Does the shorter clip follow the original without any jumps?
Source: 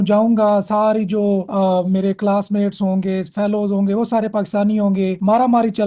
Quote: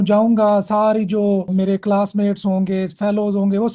no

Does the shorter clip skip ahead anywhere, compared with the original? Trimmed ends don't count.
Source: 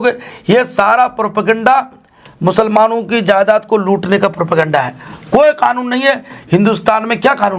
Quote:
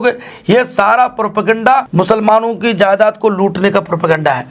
yes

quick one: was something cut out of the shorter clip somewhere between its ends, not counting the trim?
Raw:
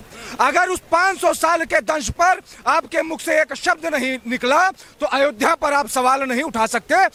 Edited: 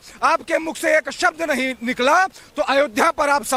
no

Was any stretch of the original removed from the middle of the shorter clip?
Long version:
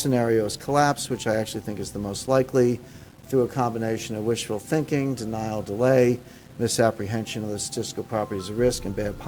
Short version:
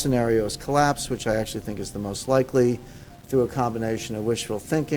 no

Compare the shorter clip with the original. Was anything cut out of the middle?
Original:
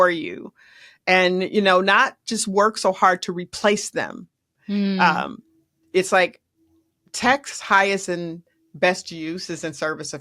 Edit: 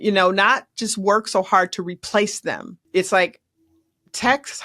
yes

